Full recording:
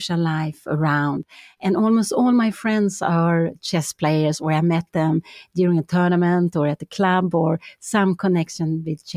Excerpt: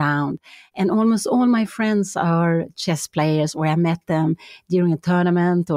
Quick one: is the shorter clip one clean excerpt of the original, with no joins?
yes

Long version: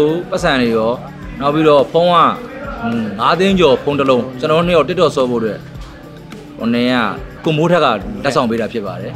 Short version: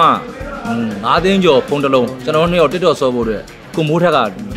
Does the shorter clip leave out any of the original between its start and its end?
yes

